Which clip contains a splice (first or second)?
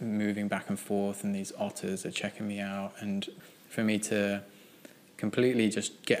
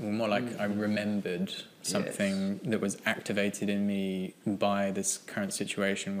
first